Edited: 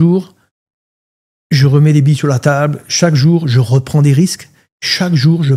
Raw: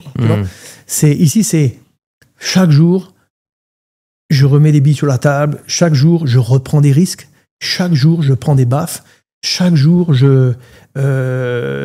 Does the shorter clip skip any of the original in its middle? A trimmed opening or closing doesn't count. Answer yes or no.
no